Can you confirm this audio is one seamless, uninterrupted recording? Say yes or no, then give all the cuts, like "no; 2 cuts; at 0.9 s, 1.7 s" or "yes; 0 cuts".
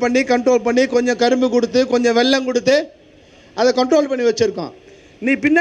yes; 0 cuts